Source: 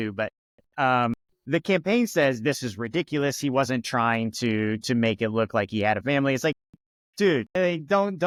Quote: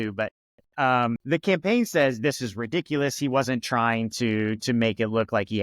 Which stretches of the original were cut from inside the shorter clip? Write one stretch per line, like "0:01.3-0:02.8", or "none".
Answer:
0:01.2-0:01.4